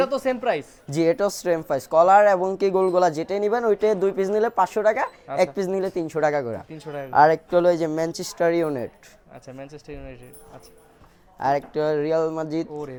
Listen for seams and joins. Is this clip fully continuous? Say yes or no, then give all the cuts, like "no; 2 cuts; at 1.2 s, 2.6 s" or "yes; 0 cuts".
yes; 0 cuts